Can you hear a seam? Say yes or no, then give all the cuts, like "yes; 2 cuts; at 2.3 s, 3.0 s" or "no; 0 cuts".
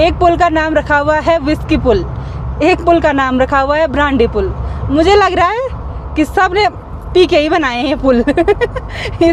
no; 0 cuts